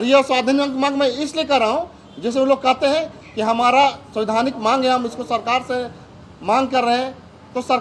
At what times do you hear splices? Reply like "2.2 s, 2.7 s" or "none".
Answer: none